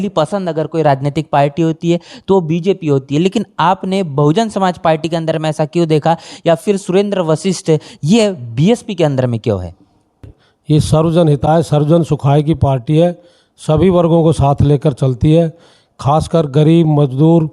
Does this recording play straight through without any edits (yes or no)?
no